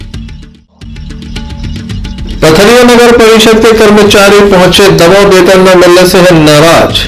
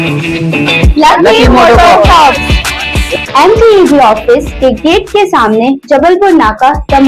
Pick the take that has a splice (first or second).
first